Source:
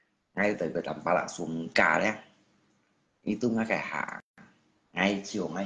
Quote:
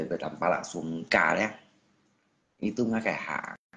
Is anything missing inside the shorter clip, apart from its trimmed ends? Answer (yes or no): no